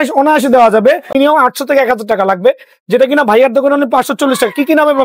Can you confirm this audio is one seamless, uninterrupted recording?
no; 1 cut; at 1.1 s

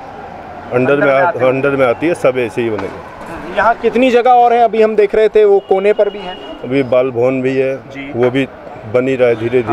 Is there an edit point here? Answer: no; 0 cuts

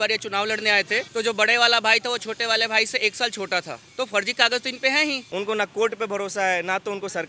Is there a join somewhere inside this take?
yes; 3 cuts; at 1.1 s, 3.8 s, 5.2 s

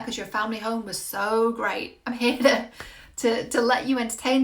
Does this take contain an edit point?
no; 0 cuts

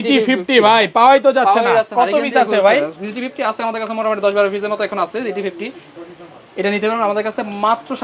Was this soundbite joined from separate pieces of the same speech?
no; 0 cuts

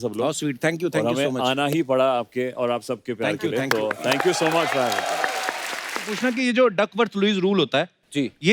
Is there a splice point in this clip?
yes; 1 cut; at 6.1 s

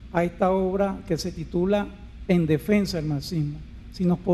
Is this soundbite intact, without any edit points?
no; 1 cut; at 2.6 s

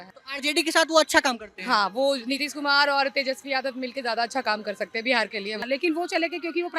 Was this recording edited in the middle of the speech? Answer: yes; 1 cut; at 5.6 s

